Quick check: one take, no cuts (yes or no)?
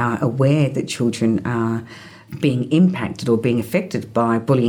yes